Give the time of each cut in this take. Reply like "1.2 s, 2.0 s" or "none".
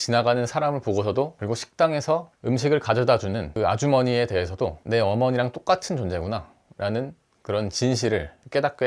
1.4 s, 4.8 s